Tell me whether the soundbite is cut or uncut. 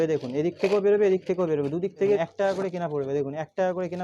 cut